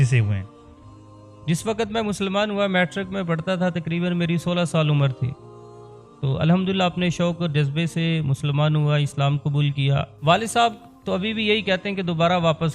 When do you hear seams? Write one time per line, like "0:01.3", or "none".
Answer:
0:10.1